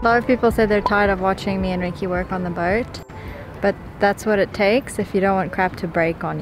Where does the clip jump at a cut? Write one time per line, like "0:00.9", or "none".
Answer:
none